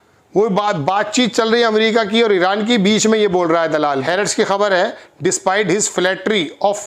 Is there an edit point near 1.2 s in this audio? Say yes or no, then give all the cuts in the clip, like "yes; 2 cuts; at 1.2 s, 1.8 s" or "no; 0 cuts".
no; 1 cut; at 4.0 s